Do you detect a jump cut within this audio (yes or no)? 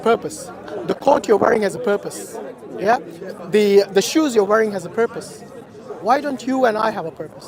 no